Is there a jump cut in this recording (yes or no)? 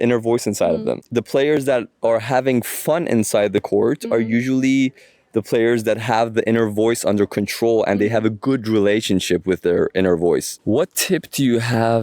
yes